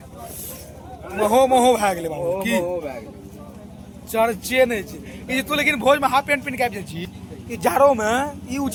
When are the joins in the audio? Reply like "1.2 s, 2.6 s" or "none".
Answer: none